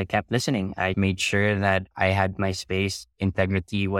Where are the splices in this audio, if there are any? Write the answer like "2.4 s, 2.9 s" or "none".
0.9 s